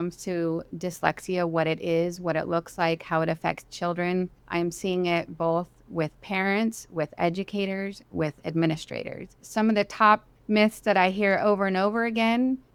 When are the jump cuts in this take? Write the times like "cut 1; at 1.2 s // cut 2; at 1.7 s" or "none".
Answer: none